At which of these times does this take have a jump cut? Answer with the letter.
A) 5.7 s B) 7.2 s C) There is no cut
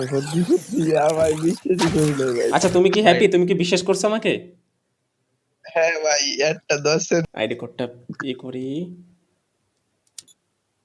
B